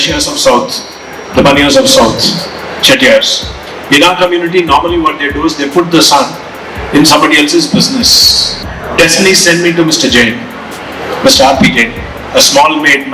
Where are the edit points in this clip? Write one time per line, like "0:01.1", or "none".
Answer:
0:08.6